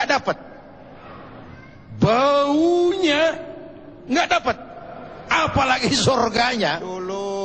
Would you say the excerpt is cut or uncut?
cut